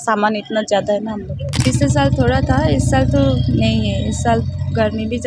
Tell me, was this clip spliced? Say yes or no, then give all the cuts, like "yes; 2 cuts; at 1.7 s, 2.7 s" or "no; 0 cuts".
yes; 1 cut; at 1.4 s